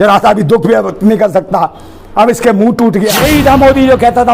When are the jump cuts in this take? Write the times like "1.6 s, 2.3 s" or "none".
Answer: 3.2 s